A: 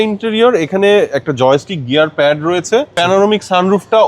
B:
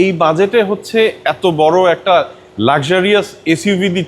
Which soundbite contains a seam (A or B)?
A